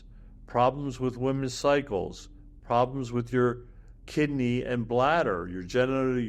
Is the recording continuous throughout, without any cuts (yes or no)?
yes